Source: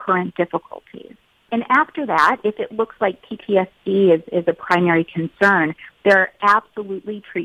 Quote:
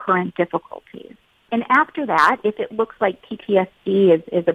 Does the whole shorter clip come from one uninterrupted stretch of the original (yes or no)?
yes